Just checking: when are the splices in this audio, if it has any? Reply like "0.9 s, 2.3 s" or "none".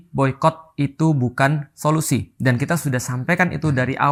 none